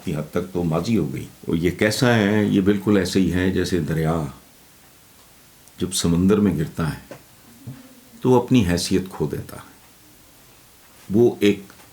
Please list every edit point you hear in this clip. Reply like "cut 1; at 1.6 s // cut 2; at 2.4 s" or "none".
cut 1; at 1.3 s